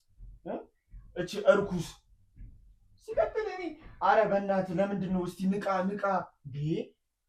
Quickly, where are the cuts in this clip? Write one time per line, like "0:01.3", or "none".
none